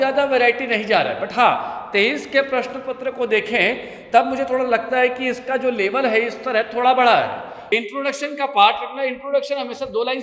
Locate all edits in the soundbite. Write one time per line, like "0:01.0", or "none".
0:07.5